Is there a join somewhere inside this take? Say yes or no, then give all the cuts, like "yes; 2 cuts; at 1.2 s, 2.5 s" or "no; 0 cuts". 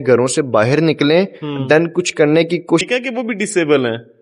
yes; 1 cut; at 2.8 s